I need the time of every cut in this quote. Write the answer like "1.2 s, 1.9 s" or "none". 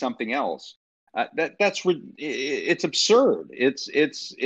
none